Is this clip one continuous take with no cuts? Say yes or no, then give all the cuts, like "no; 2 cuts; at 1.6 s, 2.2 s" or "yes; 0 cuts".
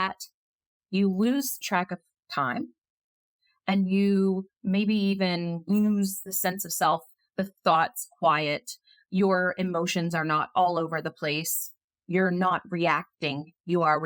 yes; 0 cuts